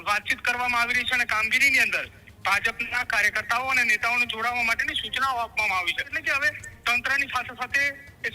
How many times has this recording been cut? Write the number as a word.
one